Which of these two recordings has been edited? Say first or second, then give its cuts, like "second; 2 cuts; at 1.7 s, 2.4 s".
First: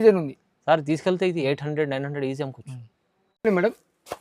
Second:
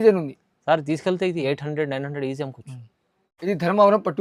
second; 1 cut; at 3.3 s